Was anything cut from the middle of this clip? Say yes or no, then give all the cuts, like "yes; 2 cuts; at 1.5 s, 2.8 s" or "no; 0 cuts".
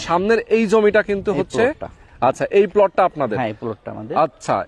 no; 0 cuts